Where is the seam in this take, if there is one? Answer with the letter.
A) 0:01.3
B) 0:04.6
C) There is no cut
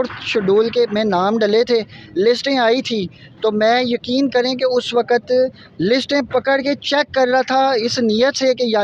C